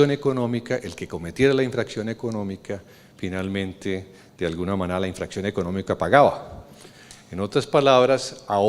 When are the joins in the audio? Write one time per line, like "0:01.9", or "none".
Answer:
0:04.4